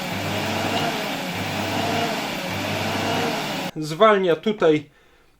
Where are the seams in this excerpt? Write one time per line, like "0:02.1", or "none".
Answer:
0:03.7